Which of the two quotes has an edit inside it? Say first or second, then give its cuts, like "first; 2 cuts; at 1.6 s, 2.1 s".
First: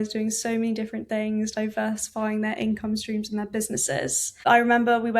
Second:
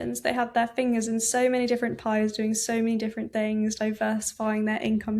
first; 1 cut; at 4.3 s